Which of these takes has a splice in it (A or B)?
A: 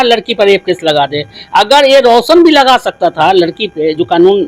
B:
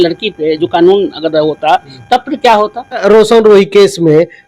B